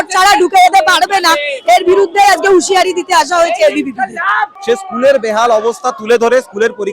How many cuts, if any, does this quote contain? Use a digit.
1